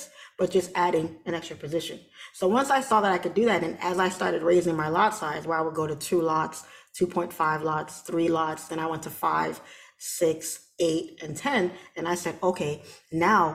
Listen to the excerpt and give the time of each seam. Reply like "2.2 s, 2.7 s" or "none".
none